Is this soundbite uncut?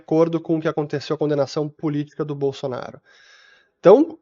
yes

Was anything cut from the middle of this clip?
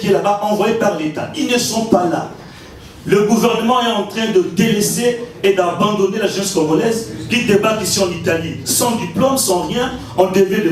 no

